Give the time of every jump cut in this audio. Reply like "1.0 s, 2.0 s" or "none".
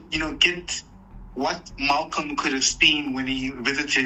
none